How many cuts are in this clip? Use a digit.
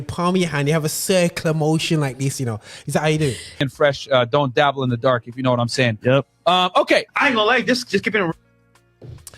1